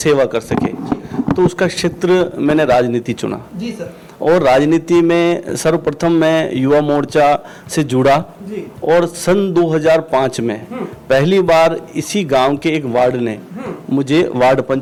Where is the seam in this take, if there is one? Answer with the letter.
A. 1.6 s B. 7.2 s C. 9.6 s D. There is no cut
D